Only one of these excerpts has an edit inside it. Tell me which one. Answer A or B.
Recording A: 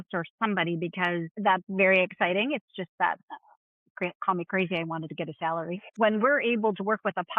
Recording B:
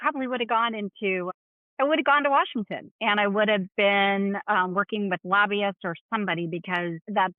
A